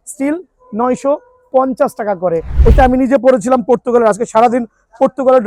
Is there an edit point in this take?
yes; 1 cut; at 2.5 s

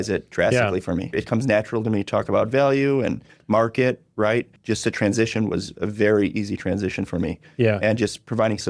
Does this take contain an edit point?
yes; 2 cuts; at 1.2 s, 4.5 s

